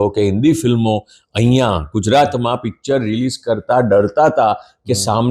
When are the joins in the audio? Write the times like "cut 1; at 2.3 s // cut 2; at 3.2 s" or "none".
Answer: none